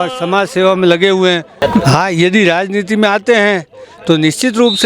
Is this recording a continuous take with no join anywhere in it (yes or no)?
no